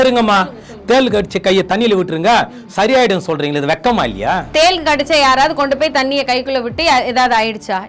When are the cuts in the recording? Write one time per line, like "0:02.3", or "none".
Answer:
0:04.4

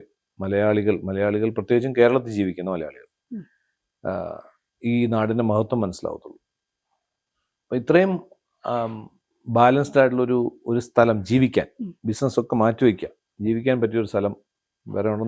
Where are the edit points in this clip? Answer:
none

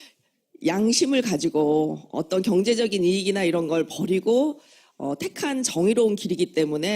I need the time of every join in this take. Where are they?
0:03.2

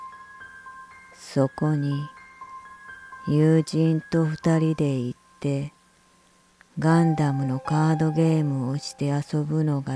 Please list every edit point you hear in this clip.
0:04.9

